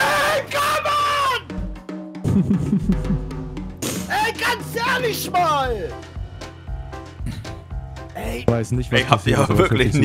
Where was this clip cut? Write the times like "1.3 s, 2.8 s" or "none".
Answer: none